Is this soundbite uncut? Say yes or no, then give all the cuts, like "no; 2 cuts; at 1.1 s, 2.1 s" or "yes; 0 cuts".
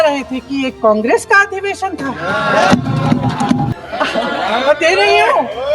no; 1 cut; at 3.7 s